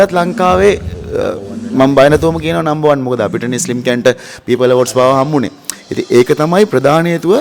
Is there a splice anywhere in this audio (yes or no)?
no